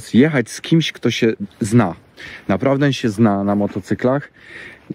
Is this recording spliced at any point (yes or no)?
no